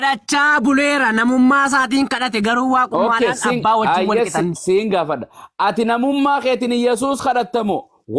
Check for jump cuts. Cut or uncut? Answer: uncut